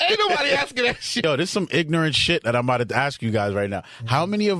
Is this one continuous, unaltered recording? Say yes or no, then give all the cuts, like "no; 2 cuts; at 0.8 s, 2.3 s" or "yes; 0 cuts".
no; 1 cut; at 1.2 s